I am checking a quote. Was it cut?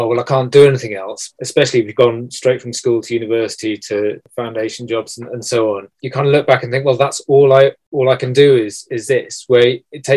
yes; 4 cuts; at 1.3 s, 4.2 s, 5.9 s, 7.8 s

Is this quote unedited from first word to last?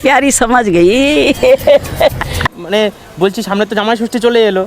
no; 1 cut; at 2.6 s

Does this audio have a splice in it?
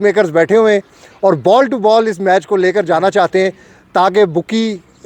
no; 0 cuts

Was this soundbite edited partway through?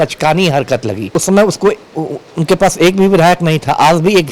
yes; 1 cut; at 1.0 s

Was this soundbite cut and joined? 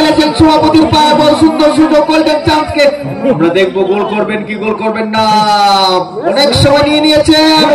no; 0 cuts

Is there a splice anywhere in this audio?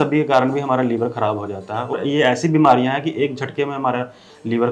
yes; 1 cut; at 1.9 s

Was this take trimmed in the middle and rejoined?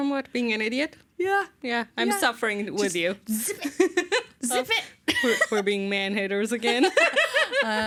no; 0 cuts

